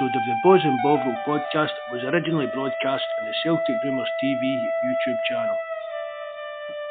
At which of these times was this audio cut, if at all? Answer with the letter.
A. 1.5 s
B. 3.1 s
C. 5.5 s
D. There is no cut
D